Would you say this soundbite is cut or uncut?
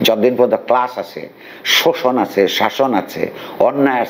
uncut